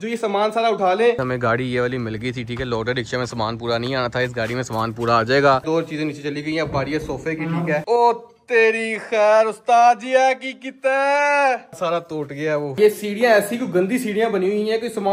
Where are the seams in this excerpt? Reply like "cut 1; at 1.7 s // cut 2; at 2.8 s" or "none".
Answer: cut 1; at 1.2 s // cut 2; at 5.6 s // cut 3; at 7.8 s // cut 4; at 12.8 s